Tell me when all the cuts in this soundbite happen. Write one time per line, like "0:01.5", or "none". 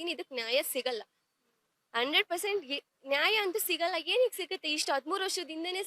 none